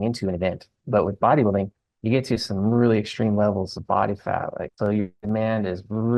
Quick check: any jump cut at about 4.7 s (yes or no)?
yes